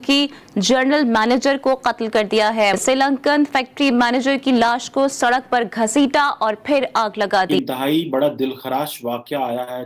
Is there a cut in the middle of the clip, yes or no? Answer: yes